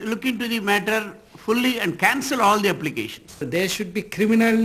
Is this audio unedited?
no; 1 cut; at 3.4 s

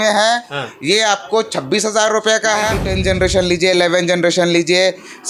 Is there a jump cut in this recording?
yes; 1 cut; at 2.9 s

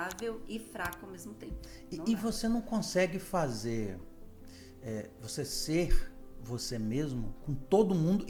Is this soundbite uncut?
yes; 0 cuts

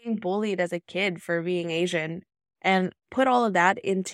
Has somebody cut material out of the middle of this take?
no; 0 cuts

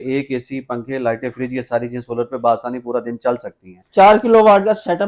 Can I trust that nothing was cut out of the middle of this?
yes; 0 cuts

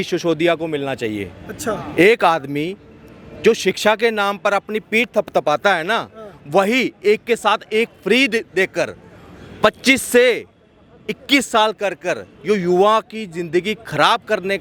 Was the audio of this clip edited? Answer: no; 0 cuts

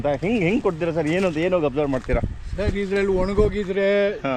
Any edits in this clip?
no; 0 cuts

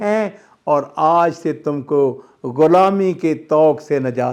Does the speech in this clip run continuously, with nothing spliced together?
yes; 0 cuts

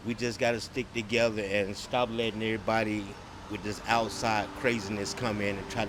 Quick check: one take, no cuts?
yes; 0 cuts

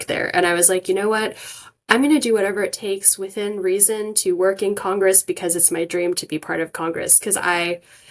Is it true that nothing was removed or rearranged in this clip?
yes; 0 cuts

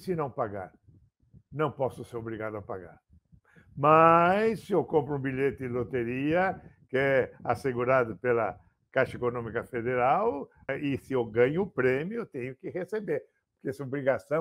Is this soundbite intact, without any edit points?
no; 1 cut; at 10.6 s

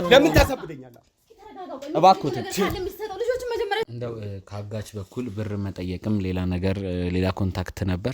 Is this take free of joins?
no; 1 cut; at 3.9 s

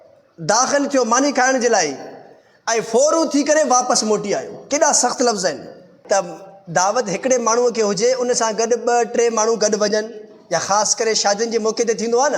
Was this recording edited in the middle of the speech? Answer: yes; 1 cut; at 5.9 s

